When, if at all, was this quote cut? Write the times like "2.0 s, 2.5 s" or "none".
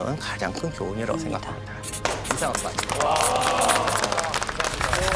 none